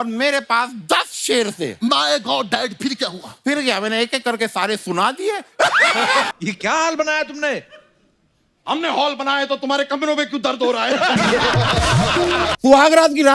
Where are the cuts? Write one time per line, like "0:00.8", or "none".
0:06.3
0:12.5